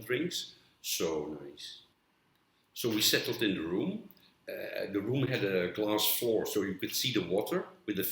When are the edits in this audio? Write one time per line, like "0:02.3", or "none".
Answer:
0:02.2